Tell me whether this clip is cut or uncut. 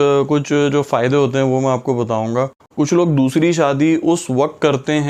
cut